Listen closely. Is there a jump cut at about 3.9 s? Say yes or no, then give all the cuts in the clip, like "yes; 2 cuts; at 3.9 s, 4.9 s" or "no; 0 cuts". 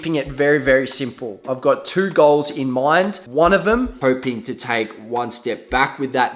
yes; 2 cuts; at 3.2 s, 3.9 s